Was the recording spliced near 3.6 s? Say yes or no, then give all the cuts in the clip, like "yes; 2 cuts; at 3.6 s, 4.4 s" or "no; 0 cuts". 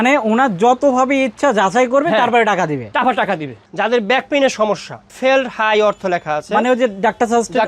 yes; 1 cut; at 3.6 s